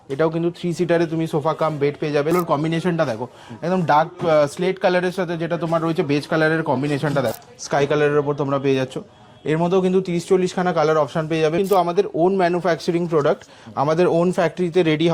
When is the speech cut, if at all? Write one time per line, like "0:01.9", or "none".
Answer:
0:02.3
0:07.5
0:11.6